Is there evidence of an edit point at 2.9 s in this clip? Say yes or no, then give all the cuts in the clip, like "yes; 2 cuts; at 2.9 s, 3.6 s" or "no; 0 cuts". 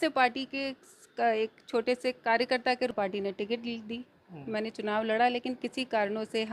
yes; 1 cut; at 2.9 s